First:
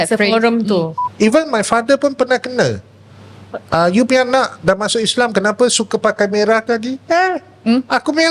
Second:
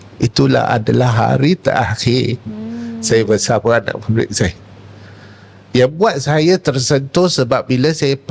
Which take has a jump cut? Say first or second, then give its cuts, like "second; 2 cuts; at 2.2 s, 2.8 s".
first; 1 cut; at 1.0 s